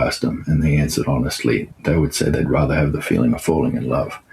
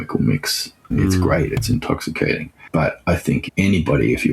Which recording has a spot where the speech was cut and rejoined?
second; 3 cuts; at 0.9 s, 2.5 s, 3.4 s

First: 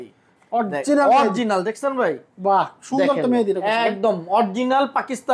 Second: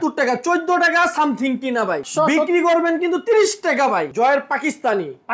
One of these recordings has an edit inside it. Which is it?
second; 2 cuts; at 2.1 s, 4.1 s

